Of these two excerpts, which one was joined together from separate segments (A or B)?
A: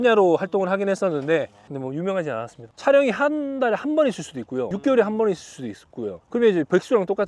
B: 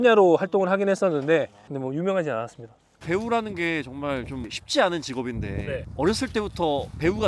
A